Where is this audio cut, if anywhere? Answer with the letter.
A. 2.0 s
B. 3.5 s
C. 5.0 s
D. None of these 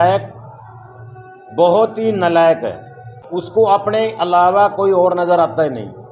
B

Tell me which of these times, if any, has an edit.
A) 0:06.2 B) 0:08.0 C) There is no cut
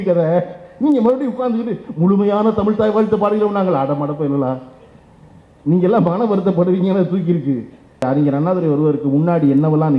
B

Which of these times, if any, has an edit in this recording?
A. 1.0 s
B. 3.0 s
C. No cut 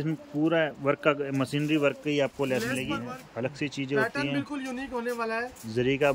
B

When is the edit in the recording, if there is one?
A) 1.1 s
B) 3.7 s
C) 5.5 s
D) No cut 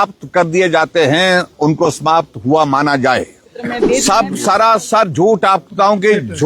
B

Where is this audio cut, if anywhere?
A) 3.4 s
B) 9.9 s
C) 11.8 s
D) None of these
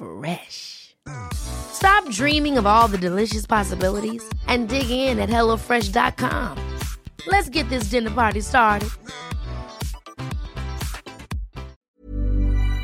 C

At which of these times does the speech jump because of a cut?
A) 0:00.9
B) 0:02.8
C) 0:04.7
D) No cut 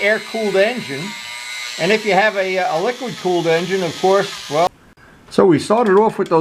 C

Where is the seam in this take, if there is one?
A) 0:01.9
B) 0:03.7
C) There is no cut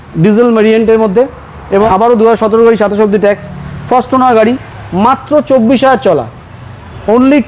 A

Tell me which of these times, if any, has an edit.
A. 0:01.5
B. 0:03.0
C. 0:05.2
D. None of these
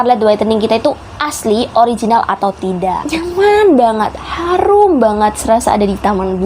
B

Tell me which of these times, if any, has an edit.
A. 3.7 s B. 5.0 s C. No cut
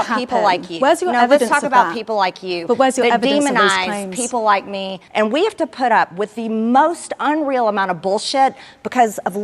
B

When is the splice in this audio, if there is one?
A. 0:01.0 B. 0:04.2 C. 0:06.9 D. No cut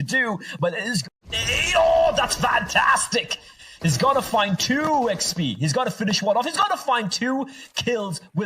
A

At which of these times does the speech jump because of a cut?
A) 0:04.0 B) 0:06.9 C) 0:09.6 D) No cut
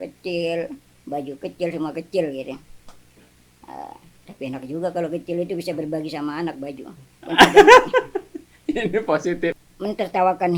C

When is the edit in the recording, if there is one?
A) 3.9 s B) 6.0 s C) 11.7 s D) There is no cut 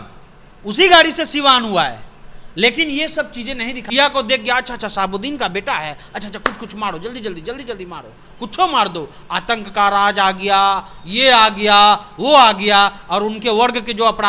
A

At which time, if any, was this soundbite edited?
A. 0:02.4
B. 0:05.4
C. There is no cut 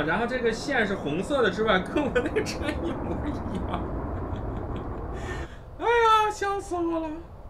B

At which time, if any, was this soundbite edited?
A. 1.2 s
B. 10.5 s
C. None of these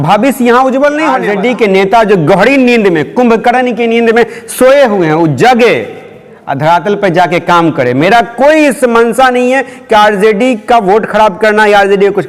A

